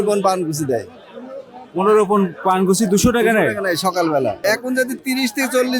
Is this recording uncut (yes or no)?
no